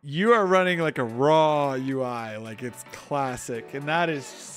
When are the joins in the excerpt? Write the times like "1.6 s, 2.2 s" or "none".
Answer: none

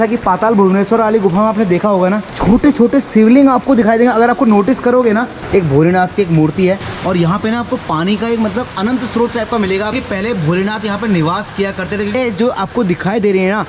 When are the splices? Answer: 2.3 s, 5.4 s, 6.8 s, 9.9 s, 12.1 s

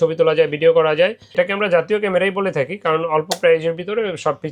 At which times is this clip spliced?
1.3 s

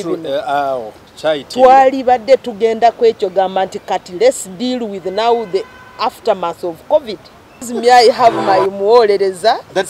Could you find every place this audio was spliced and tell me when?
7.7 s

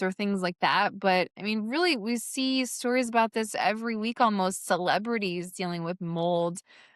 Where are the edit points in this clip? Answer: none

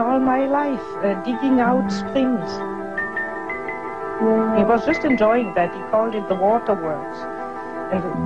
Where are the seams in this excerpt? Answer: 5.5 s

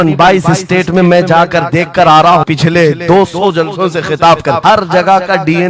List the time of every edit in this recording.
2.5 s, 4.6 s

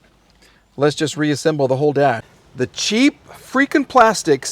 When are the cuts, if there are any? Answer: 2.3 s

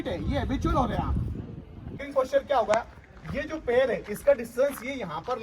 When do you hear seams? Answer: 2.0 s

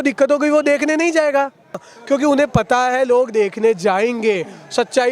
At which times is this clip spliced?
1.9 s

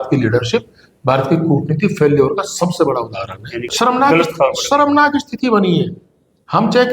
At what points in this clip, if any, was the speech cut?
3.7 s

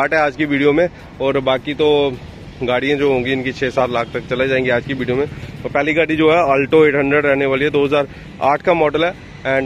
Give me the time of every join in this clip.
none

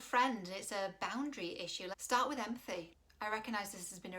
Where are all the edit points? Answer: 1.9 s, 2.9 s

